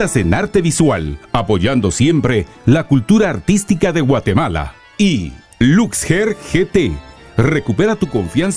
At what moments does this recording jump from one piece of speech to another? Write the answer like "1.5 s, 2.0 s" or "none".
1.2 s, 5.2 s